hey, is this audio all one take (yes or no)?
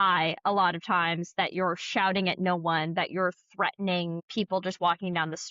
no